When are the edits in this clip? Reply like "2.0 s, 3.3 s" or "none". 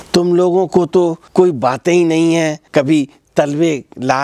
1.2 s, 2.6 s

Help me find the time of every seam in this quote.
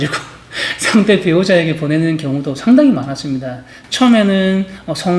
3.8 s

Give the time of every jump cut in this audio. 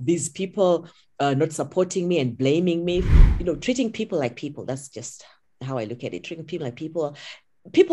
3.1 s

